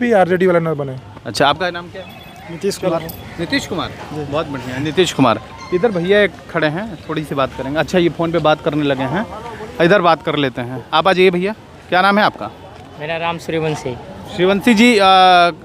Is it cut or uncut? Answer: uncut